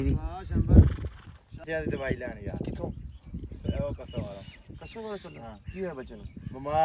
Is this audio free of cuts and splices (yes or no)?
no